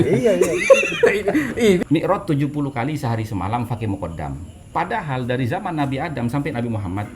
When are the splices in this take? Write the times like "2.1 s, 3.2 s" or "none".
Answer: 1.8 s, 4.5 s